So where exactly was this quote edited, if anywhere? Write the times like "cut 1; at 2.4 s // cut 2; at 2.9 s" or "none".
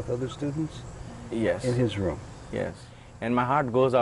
cut 1; at 2.9 s